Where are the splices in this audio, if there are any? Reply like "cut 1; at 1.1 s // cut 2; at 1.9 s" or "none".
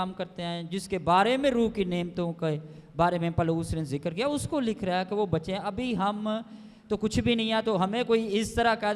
none